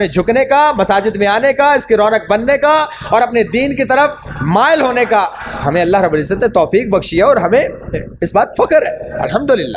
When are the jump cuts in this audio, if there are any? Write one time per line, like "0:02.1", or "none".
none